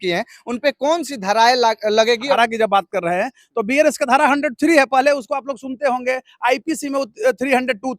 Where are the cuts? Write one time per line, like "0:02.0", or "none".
0:02.4